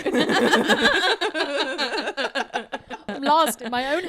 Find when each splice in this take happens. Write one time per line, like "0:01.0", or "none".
0:03.1